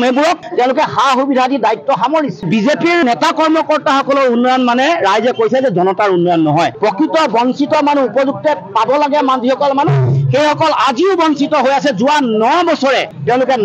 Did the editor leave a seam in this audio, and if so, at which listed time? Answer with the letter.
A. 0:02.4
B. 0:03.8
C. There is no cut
A